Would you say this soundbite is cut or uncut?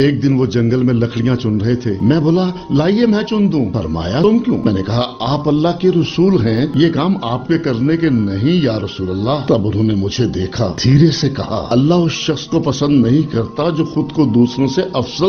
uncut